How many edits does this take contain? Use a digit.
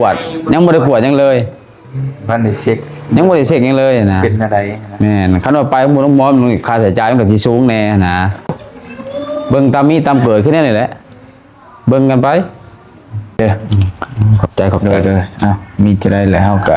2